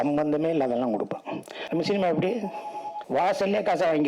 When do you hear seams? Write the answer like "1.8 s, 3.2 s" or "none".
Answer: 1.6 s

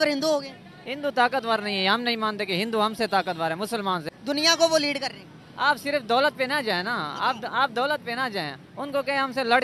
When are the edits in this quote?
4.1 s

